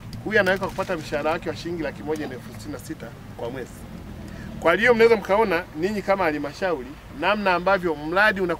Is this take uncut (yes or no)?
yes